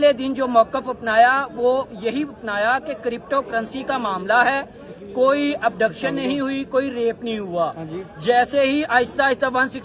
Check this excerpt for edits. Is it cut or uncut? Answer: uncut